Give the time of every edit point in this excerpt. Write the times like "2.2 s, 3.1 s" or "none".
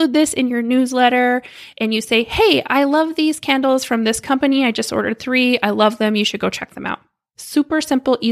none